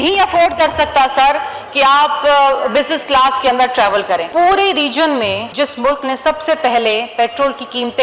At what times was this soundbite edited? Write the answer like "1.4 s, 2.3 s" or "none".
4.3 s, 5.5 s